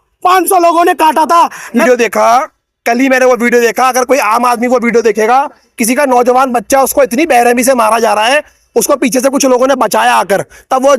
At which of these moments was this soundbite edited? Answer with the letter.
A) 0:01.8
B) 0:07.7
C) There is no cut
A